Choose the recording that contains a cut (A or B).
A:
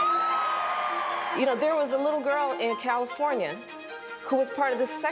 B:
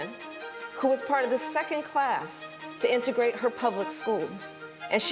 A